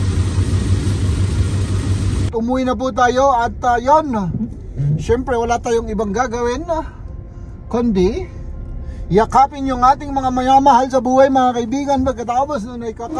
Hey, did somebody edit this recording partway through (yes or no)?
yes